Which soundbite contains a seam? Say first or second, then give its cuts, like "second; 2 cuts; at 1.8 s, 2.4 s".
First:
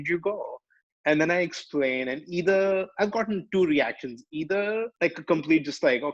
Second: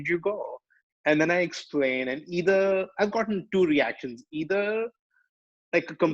first; 1 cut; at 4.9 s